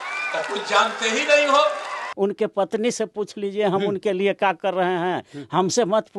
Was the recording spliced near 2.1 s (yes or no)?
yes